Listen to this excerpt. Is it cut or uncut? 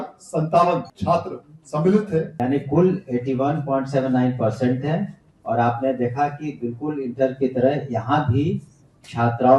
cut